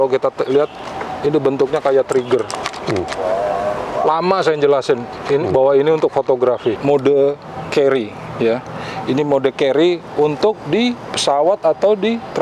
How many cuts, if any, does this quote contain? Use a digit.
1